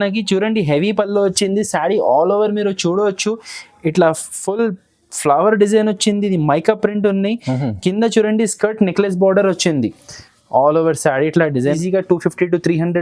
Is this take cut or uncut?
cut